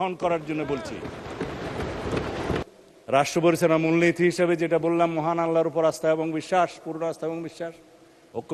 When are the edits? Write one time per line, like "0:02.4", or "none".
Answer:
0:02.7